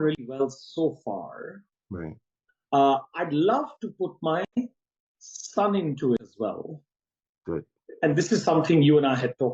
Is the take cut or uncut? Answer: uncut